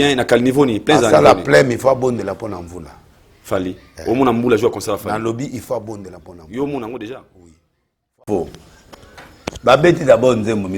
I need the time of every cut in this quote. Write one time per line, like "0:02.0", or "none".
0:08.1

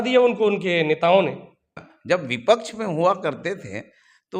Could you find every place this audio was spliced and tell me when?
0:01.7

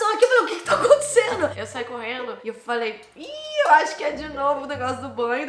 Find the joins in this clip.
0:01.5

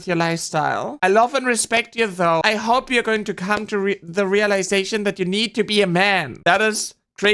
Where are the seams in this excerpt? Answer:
0:02.4
0:06.3

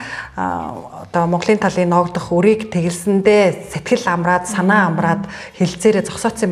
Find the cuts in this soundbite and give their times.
none

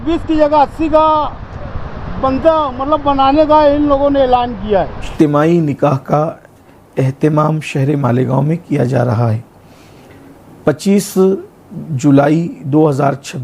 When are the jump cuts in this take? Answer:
0:05.1

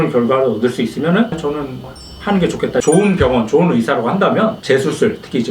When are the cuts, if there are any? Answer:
0:02.8
0:04.6

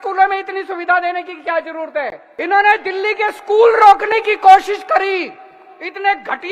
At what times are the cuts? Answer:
0:02.2

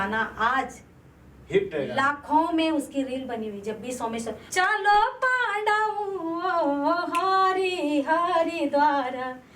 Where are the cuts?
0:04.4

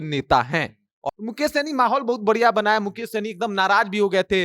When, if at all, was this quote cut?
0:01.0

